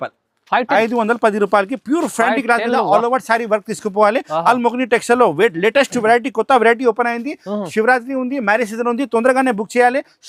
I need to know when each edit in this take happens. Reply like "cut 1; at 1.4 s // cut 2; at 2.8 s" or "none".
none